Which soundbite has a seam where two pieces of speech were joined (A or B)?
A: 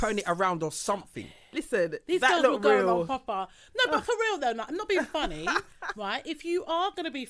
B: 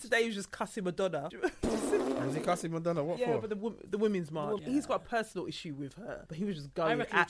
B